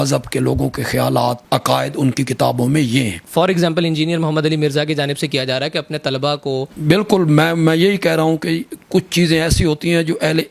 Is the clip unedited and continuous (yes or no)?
no